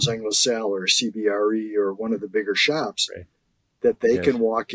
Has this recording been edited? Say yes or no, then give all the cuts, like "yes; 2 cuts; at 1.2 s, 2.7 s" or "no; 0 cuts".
no; 0 cuts